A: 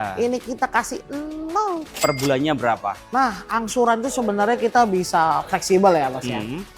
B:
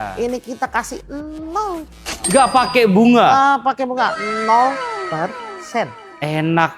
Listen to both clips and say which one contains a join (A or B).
A